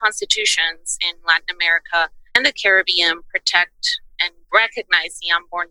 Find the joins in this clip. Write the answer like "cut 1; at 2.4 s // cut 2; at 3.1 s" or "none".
cut 1; at 2.2 s